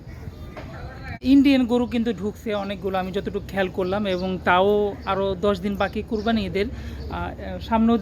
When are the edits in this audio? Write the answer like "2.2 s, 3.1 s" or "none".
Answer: 1.2 s